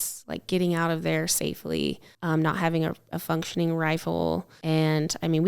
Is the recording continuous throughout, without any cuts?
no; 2 cuts; at 2.1 s, 4.5 s

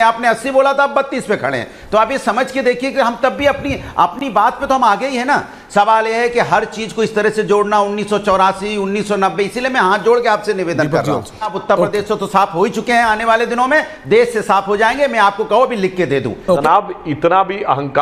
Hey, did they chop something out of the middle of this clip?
yes; 2 cuts; at 11.5 s, 16.6 s

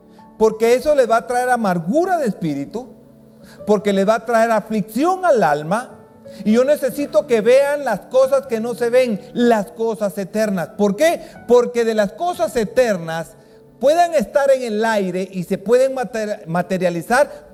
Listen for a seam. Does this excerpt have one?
no; 0 cuts

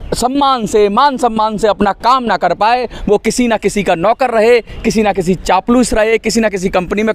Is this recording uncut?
yes; 0 cuts

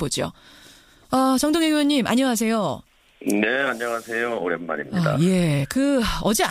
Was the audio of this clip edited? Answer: yes; 1 cut; at 2.0 s

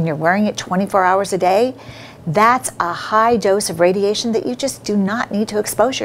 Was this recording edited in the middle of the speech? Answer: no; 0 cuts

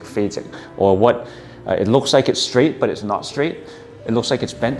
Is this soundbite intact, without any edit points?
yes; 0 cuts

